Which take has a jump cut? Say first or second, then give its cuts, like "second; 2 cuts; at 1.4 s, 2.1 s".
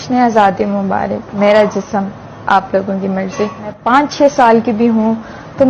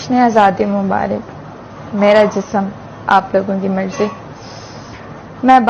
first; 2 cuts; at 1.2 s, 3.8 s